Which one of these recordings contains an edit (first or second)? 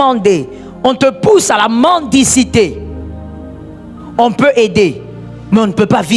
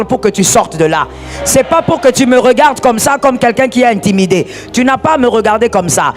first